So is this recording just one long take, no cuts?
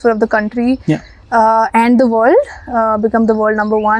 yes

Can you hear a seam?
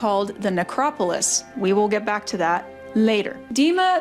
no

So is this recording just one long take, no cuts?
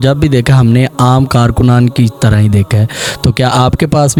yes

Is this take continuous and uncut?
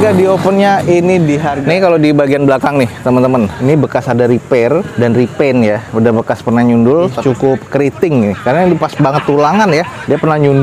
no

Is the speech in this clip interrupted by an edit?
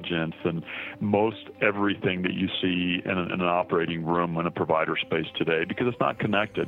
no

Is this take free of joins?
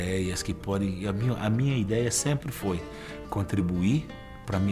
yes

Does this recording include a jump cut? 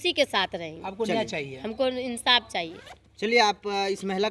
no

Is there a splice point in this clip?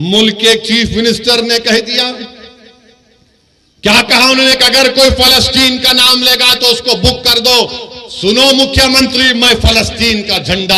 no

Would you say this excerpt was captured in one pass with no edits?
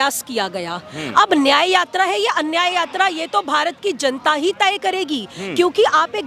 yes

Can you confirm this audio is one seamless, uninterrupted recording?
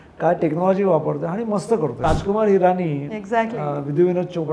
no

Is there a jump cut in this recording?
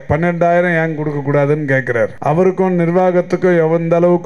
yes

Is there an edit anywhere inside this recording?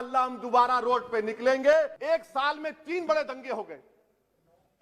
yes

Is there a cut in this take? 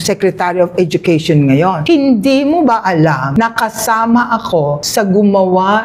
yes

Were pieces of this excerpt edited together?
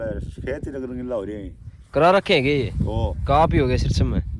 no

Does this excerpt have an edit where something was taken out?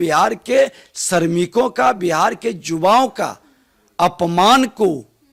no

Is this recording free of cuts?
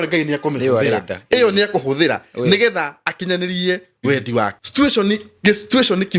no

